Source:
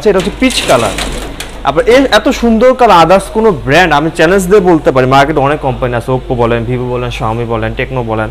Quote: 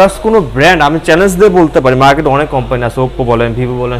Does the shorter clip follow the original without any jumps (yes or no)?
yes